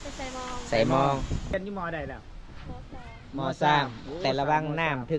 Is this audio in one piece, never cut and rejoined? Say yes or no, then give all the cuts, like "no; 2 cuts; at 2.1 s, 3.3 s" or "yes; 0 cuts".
no; 1 cut; at 1.5 s